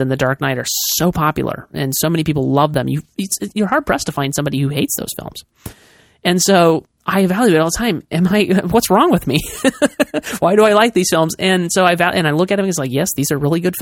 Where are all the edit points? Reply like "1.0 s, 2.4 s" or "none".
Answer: 2.7 s